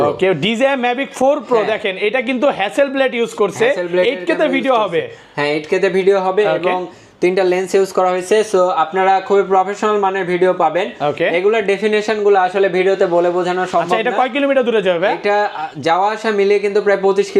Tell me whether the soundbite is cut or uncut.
uncut